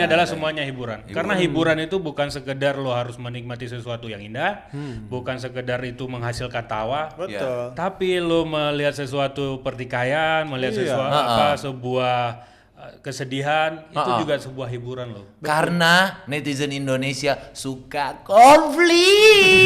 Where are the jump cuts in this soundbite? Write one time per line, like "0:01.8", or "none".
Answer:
none